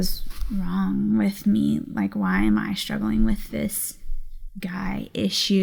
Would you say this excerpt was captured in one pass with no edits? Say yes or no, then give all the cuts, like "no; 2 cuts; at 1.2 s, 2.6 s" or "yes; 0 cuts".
yes; 0 cuts